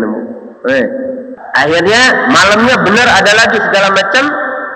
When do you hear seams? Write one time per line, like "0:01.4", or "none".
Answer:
0:01.4